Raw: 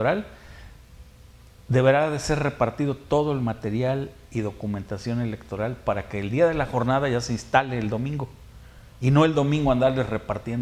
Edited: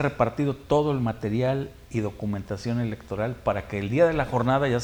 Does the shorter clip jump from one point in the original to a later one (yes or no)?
no